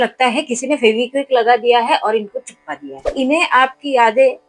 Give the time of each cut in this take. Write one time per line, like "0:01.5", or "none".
0:03.1